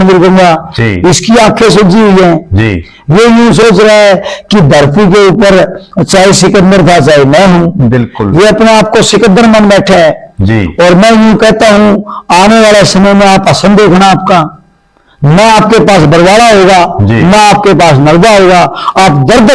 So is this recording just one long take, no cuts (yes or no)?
yes